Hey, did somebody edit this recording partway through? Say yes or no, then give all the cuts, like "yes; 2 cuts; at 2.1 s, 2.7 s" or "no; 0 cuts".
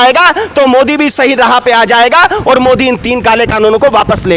no; 0 cuts